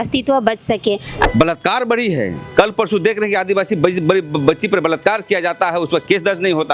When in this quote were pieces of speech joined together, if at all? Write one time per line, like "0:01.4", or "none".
0:01.3